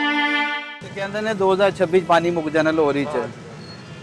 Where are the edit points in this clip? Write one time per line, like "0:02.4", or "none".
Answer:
0:01.1